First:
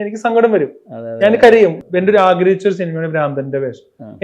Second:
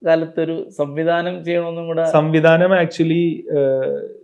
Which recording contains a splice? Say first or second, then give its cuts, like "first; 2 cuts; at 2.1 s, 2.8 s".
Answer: first; 1 cut; at 1.8 s